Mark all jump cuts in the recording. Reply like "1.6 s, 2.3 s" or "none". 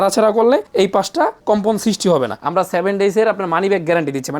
2.4 s